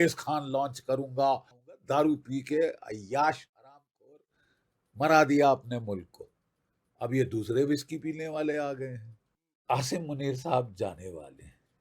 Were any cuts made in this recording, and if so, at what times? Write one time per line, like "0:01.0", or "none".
0:01.8
0:09.6